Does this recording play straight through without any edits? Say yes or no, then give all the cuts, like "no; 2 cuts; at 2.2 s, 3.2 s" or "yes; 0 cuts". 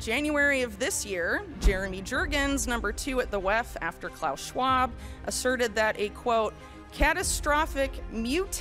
yes; 0 cuts